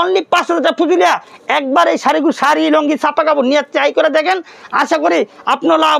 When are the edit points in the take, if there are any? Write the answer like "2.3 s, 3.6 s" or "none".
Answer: none